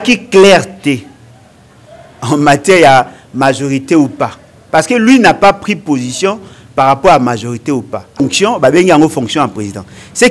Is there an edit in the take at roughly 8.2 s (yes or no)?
yes